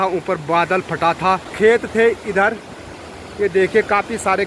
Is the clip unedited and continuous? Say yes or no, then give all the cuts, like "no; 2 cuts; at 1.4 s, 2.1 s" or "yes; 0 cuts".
no; 1 cut; at 1.5 s